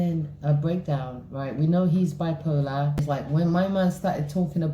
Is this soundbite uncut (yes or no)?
no